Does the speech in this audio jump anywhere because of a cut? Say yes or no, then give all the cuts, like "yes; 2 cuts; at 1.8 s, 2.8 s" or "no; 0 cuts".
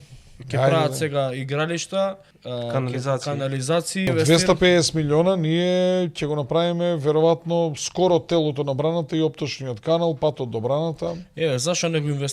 yes; 2 cuts; at 2.3 s, 4.1 s